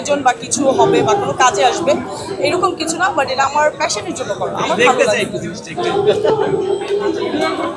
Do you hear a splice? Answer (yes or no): no